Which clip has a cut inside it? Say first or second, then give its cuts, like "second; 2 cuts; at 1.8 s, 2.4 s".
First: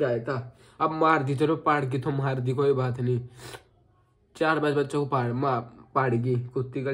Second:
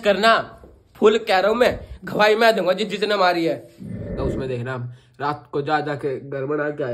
second; 1 cut; at 4.1 s